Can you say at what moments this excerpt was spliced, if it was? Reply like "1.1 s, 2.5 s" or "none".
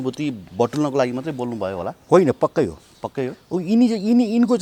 none